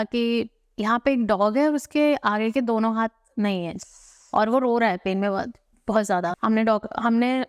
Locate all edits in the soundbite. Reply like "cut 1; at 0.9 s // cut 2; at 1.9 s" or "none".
cut 1; at 6.4 s